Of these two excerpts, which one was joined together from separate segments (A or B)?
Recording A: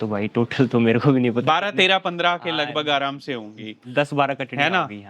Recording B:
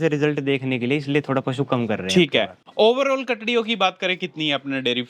B